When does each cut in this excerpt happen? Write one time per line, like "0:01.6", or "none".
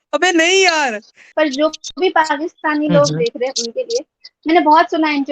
0:01.2